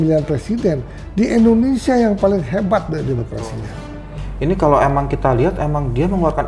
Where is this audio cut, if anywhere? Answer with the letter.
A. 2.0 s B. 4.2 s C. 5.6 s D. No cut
B